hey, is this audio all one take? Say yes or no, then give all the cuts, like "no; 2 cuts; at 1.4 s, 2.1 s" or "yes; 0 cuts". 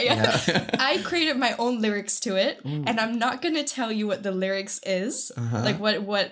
yes; 0 cuts